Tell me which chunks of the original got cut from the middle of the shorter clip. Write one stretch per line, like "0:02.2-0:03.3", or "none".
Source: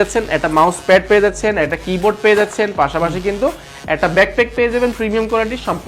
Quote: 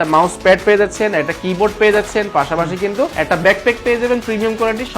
0:03.6-0:03.8

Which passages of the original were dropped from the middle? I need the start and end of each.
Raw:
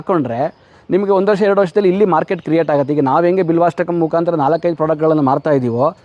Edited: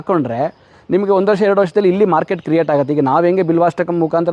none

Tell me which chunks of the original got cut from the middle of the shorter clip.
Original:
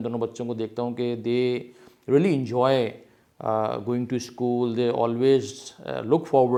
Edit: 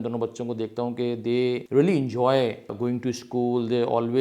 0:01.6-0:02.0
0:03.1-0:03.8

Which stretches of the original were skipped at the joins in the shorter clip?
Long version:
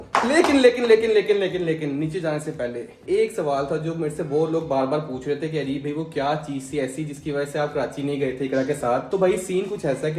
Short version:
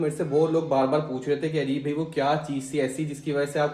none

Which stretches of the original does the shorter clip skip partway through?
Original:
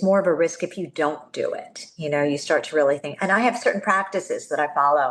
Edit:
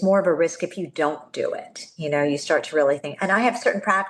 none

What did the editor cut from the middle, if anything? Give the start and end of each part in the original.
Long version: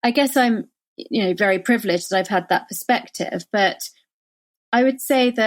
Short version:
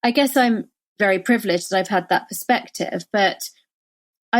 0:01.0-0:01.4

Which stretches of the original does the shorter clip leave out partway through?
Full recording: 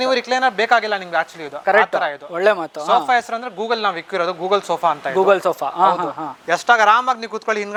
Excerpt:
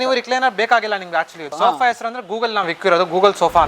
0:01.4-0:02.7

